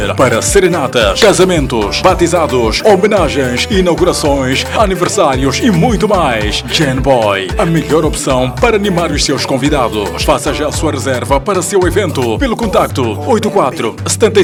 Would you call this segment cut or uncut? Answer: uncut